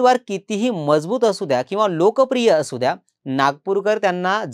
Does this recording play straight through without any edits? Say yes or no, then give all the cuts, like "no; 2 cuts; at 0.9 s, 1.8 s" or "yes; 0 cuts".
yes; 0 cuts